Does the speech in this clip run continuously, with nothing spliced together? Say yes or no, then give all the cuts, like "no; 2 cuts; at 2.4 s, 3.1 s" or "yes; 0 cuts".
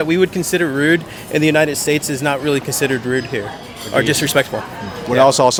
yes; 0 cuts